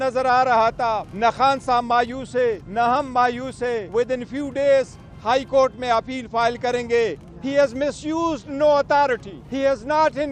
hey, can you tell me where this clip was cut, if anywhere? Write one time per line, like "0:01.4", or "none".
0:01.1
0:02.6
0:03.8
0:07.3
0:09.4